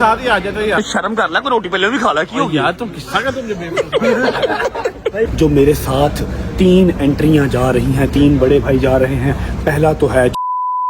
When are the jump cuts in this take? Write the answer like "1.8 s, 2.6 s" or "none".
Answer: 0.8 s, 5.3 s